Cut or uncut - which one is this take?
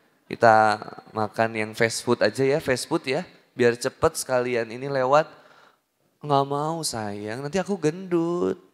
uncut